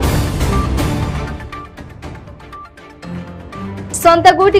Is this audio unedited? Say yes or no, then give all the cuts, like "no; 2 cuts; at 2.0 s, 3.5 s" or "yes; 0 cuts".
no; 2 cuts; at 1.1 s, 3.8 s